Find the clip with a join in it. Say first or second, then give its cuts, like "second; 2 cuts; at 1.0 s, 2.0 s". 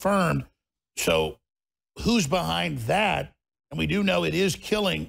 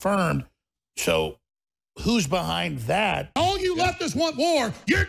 second; 1 cut; at 3.4 s